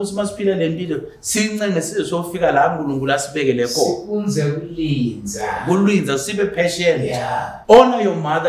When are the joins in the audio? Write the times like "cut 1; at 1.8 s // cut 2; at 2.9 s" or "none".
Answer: cut 1; at 7.5 s